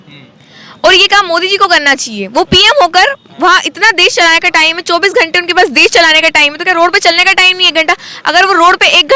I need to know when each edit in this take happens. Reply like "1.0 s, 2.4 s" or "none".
none